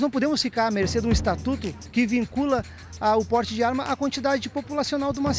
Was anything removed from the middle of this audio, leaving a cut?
no; 0 cuts

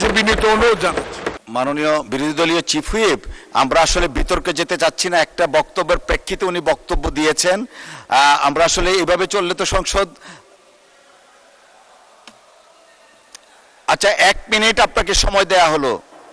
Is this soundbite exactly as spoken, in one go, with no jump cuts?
yes; 0 cuts

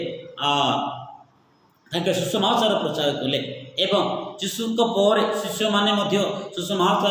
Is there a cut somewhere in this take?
no; 0 cuts

